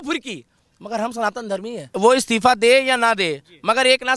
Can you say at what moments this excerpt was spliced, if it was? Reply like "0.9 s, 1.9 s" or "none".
1.8 s